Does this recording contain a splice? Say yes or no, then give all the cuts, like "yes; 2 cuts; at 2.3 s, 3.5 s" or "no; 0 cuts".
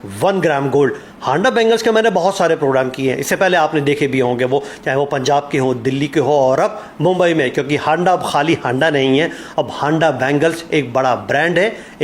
no; 0 cuts